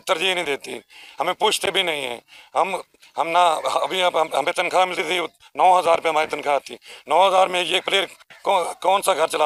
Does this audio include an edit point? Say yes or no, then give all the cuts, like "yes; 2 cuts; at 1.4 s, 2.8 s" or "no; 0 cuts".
no; 0 cuts